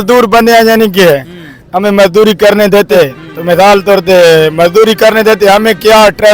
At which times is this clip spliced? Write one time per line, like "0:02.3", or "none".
0:02.9